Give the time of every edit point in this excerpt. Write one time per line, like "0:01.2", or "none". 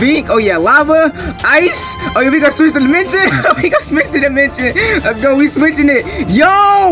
none